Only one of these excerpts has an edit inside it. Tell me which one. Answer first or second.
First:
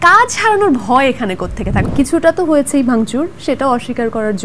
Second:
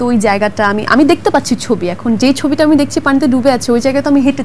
first